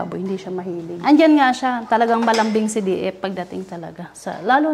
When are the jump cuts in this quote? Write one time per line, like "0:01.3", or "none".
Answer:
0:00.9